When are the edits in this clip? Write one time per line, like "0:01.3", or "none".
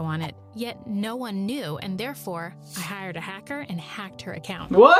none